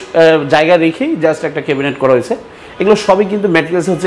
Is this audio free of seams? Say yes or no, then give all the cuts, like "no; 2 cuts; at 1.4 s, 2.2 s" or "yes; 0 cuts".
yes; 0 cuts